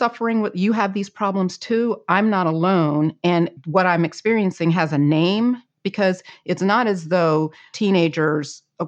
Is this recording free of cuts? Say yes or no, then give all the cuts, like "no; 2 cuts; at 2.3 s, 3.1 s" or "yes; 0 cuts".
no; 2 cuts; at 3.6 s, 7.7 s